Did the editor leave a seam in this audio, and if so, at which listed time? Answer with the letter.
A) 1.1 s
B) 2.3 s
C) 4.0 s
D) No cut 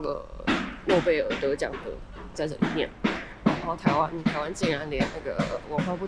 B